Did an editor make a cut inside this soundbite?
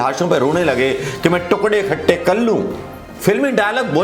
no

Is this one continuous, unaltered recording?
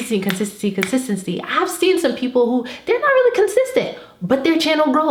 yes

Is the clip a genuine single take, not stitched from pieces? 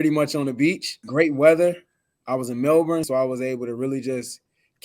no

